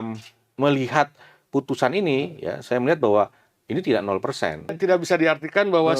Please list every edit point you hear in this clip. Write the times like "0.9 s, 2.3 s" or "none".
4.8 s

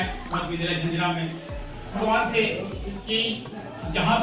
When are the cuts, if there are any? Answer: 2.0 s

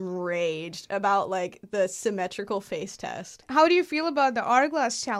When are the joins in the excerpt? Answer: 3.4 s

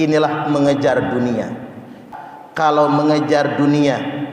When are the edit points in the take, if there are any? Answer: 2.0 s

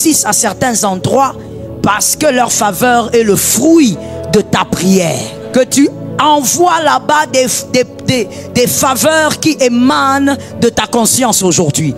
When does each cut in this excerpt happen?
5.3 s

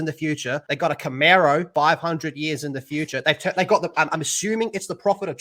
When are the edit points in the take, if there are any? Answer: none

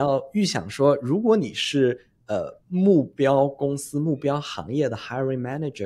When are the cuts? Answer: none

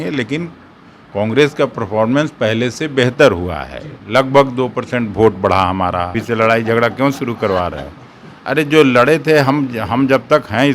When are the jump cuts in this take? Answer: 6.1 s

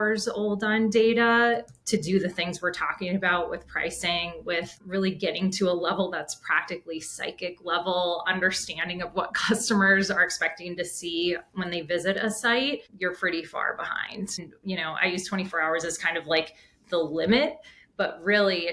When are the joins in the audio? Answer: 4.8 s, 12.9 s, 14.4 s

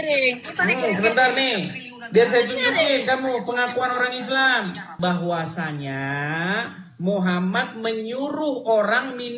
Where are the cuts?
4.9 s

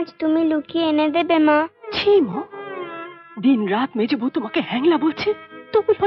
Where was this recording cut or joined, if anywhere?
none

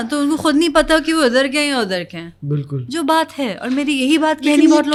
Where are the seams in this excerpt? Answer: none

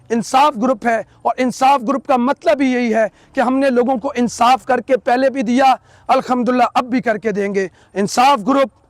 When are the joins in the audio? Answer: none

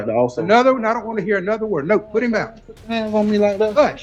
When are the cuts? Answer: none

